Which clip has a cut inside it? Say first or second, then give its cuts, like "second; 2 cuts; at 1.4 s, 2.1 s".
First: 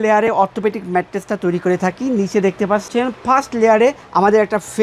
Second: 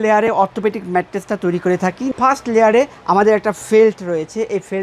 second; 1 cut; at 2.1 s